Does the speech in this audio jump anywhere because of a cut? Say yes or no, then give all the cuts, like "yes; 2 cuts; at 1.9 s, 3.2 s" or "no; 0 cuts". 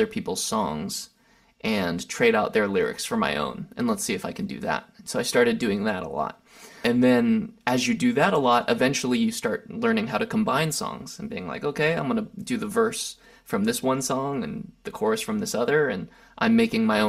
yes; 1 cut; at 6.7 s